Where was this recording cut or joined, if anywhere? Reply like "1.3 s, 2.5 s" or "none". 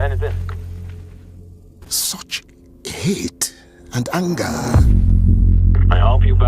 1.5 s

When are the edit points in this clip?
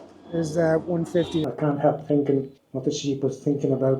1.4 s, 2.6 s

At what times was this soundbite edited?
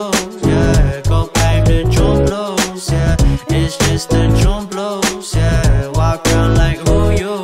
1.3 s

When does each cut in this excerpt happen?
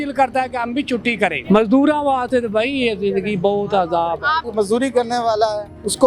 1.4 s, 4.5 s

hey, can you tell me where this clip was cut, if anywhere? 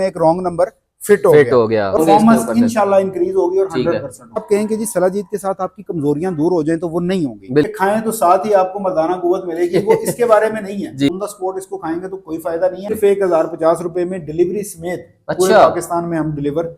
2.0 s, 4.4 s, 7.7 s, 11.1 s, 13.0 s

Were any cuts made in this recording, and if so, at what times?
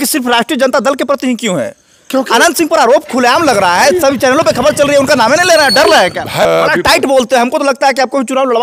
6.4 s

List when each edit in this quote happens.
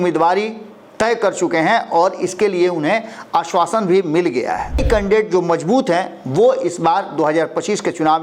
4.8 s

